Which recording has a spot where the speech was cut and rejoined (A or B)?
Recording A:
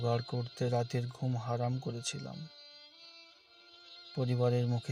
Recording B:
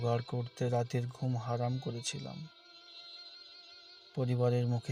B